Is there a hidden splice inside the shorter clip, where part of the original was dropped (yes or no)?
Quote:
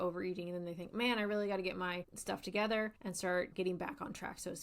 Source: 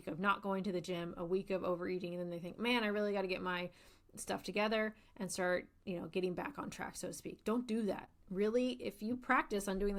yes